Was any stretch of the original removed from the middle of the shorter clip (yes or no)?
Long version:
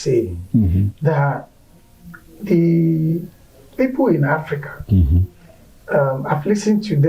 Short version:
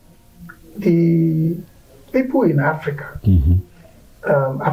no